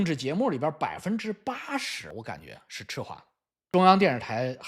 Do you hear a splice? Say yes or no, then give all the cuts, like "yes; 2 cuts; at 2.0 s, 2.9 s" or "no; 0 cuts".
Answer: no; 0 cuts